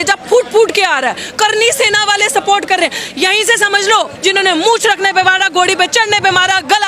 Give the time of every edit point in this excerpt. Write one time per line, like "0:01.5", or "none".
0:04.1